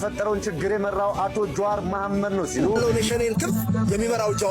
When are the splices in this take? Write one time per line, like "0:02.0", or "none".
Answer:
0:02.8